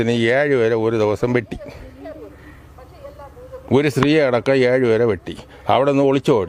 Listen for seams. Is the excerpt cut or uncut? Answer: uncut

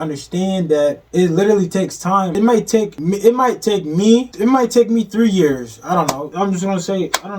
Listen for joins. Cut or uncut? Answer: cut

